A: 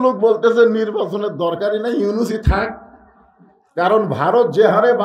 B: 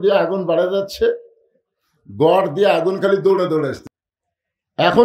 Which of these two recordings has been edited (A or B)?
B